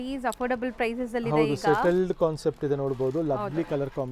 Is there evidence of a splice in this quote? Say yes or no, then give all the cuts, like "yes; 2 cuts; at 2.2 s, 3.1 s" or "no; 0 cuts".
no; 0 cuts